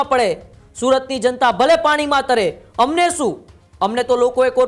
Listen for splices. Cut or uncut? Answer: uncut